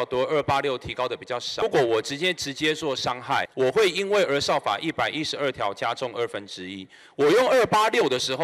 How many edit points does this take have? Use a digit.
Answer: 2